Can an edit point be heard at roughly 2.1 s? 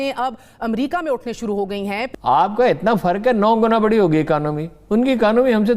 yes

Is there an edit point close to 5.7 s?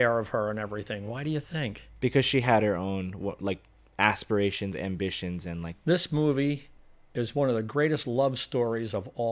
yes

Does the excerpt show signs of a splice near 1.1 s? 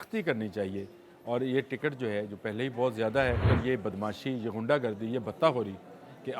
no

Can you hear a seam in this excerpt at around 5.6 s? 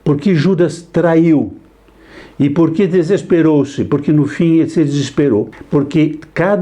yes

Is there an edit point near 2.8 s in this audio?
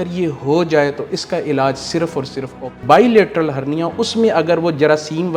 yes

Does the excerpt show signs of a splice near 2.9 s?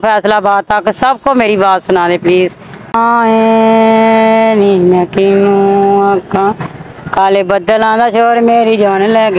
yes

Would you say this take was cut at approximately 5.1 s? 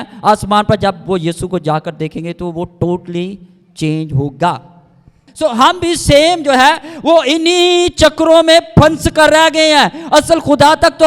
yes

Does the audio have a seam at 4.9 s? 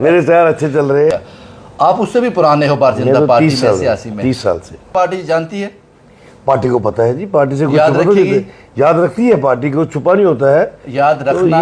yes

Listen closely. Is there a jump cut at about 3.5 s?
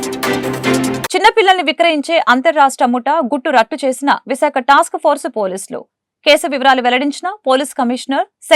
no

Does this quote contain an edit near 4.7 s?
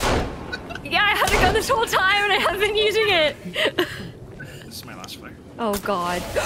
yes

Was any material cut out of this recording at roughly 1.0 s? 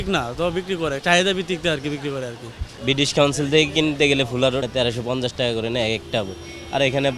no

